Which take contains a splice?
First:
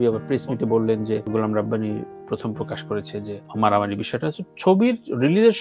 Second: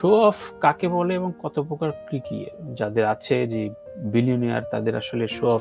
first; 2 cuts; at 1.3 s, 3.4 s

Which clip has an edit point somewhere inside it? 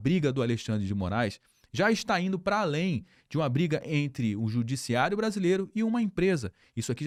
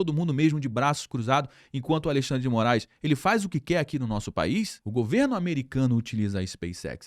second; 1 cut; at 4.8 s

